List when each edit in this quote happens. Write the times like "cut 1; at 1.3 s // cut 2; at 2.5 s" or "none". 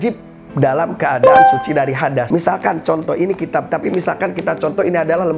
cut 1; at 2.3 s